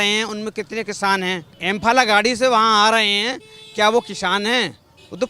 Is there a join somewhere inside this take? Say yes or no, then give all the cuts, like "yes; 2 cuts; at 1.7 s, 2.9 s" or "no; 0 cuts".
yes; 1 cut; at 1.5 s